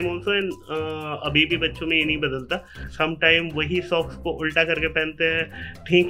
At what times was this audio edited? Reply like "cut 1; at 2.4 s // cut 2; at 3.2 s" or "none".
cut 1; at 2.8 s